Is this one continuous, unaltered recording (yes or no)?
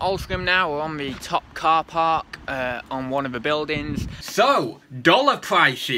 no